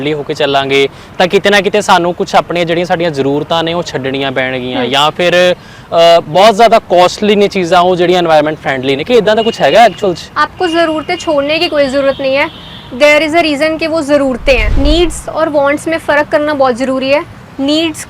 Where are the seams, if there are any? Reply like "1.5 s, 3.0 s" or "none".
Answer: 10.3 s, 14.7 s